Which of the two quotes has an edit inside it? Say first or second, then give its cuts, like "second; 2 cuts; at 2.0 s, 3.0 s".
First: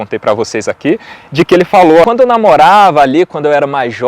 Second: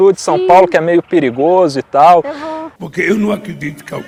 first; 1 cut; at 2.0 s